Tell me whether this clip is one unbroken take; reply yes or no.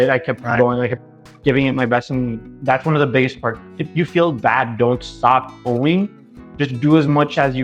yes